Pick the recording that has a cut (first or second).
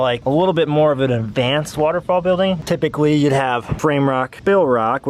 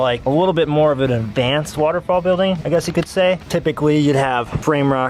first